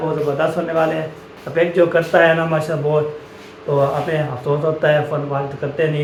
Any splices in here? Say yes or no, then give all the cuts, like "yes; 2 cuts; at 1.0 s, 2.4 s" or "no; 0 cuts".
no; 0 cuts